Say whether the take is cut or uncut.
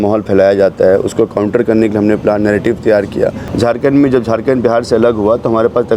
cut